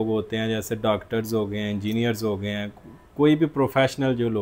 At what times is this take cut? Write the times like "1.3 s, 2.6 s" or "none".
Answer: none